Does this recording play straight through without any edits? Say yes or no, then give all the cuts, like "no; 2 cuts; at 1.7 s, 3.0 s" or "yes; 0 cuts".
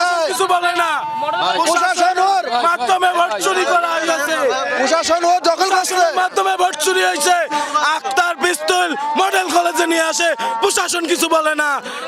yes; 0 cuts